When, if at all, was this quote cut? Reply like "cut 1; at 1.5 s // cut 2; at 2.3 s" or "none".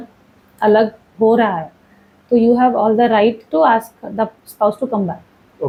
none